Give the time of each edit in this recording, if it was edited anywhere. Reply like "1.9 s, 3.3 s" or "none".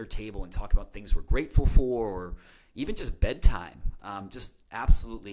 none